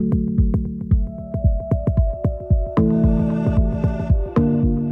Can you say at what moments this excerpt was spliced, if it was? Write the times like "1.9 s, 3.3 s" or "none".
4.0 s